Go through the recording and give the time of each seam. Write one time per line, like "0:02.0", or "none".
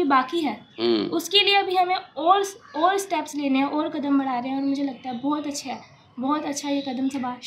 none